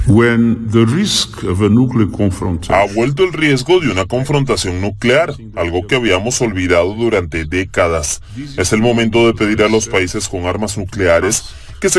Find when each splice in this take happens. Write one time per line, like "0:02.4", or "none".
0:08.5